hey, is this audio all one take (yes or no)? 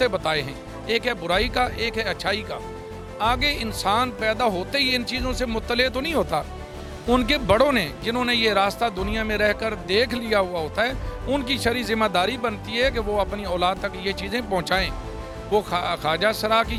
yes